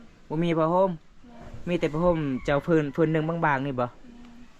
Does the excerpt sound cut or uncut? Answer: uncut